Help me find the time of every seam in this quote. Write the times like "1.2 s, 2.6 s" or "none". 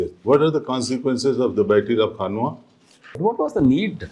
3.2 s